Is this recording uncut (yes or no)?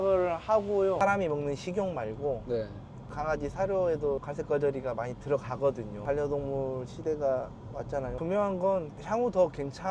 no